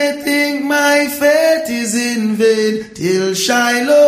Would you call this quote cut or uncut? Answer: uncut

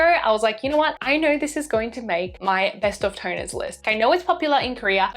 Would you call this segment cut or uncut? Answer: cut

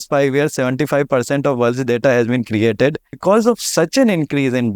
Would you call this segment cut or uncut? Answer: cut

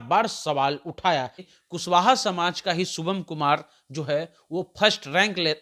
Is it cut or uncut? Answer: cut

